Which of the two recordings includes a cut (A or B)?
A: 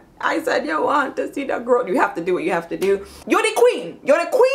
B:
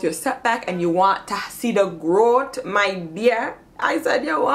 A